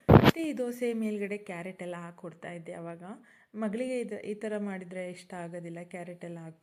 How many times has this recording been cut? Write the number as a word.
zero